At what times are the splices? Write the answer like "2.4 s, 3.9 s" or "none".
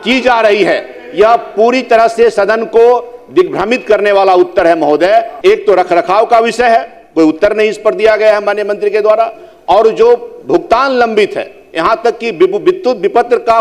5.3 s